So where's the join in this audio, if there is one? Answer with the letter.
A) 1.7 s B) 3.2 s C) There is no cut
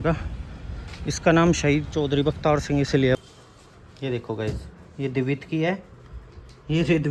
B